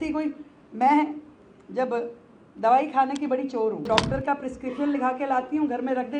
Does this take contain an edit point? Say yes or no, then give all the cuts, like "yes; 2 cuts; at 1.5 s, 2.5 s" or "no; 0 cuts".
yes; 1 cut; at 3.8 s